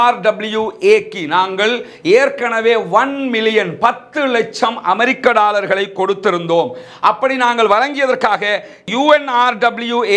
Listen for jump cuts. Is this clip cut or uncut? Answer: uncut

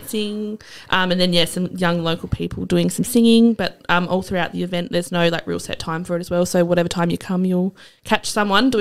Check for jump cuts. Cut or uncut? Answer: uncut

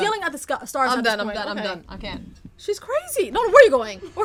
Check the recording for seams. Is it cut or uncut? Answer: uncut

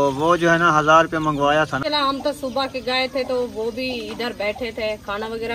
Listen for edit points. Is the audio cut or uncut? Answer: cut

